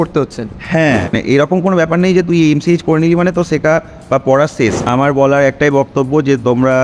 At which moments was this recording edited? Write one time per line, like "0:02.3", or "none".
0:01.2
0:04.9